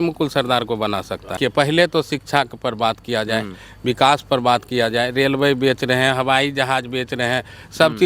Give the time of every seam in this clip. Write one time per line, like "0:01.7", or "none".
0:01.4